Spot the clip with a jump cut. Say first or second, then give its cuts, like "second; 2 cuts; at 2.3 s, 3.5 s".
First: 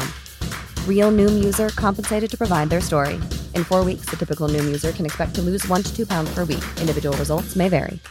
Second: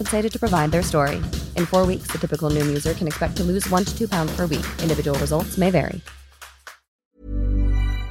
second; 1 cut; at 7.1 s